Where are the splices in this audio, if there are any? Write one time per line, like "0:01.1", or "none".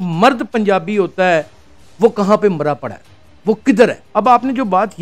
0:04.0